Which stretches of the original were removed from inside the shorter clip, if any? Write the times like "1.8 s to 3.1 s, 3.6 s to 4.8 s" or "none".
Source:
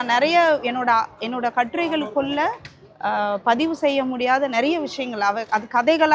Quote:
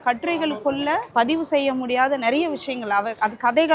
2.6 s to 3.4 s